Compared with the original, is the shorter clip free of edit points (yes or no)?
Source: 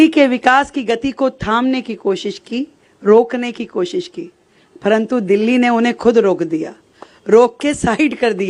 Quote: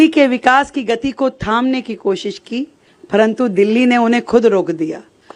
no